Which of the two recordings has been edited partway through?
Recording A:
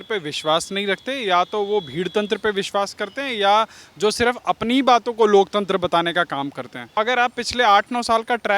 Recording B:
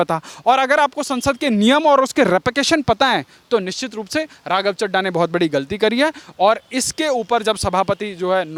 A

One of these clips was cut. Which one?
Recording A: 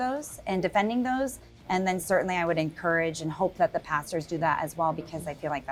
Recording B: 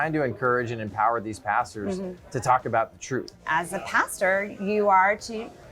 B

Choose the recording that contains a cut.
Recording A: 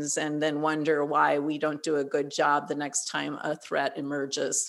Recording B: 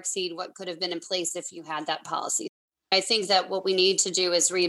B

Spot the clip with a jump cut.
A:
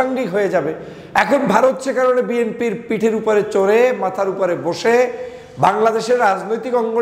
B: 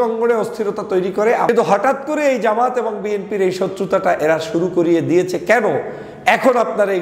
B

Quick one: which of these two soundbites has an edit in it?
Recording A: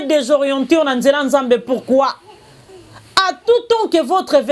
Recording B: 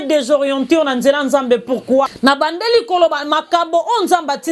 B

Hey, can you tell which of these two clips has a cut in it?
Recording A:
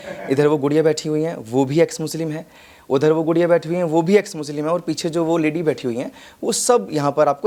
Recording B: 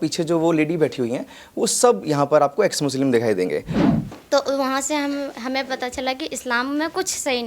B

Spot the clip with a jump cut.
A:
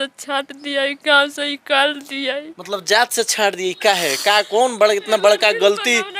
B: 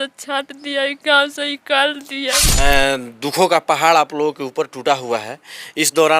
B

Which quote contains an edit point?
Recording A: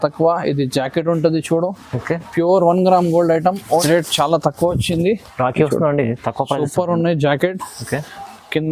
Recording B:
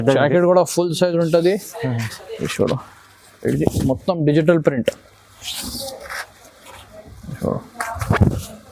A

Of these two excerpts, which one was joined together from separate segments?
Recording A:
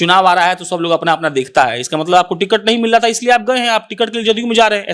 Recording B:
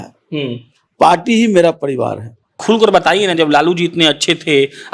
B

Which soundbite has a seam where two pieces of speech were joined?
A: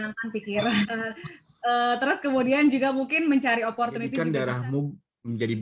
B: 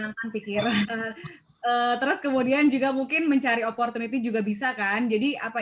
A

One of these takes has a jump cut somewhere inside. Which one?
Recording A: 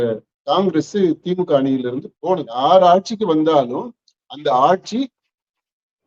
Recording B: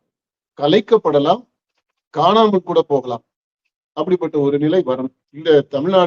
A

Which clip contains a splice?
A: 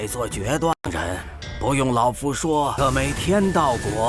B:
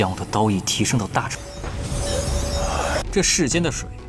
B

